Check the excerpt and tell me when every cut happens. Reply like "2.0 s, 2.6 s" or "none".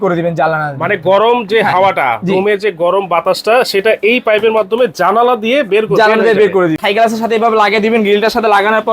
6.8 s